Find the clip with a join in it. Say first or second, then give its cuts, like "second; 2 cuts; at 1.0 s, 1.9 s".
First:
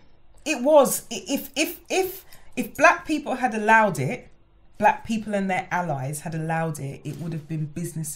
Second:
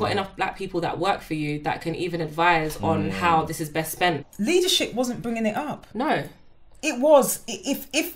second; 1 cut; at 4.3 s